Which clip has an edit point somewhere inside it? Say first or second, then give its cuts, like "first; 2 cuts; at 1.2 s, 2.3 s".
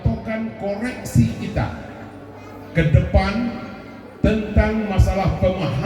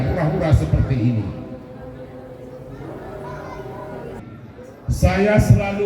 second; 1 cut; at 4.2 s